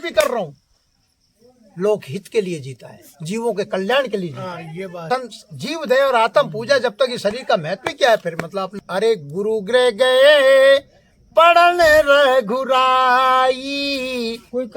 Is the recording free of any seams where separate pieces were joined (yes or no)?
no